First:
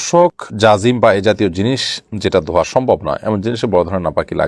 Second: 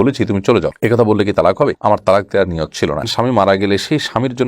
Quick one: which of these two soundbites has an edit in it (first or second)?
second